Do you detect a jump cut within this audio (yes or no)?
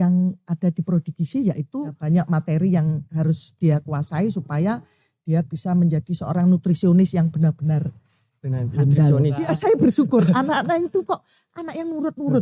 yes